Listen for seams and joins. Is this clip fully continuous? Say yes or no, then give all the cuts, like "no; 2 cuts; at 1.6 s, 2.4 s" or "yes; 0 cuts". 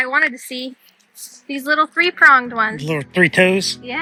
yes; 0 cuts